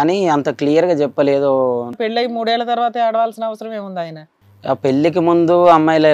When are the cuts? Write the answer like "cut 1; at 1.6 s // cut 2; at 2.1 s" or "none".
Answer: cut 1; at 2.0 s // cut 2; at 4.3 s